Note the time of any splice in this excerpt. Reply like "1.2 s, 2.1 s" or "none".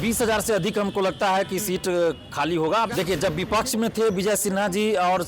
2.9 s